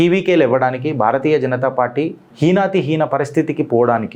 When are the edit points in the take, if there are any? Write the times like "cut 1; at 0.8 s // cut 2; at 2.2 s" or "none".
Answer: none